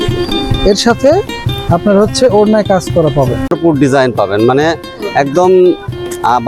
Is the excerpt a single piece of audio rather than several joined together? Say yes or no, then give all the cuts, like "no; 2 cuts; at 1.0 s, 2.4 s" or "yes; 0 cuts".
no; 1 cut; at 3.5 s